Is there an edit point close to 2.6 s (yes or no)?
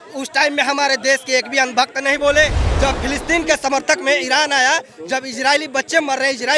yes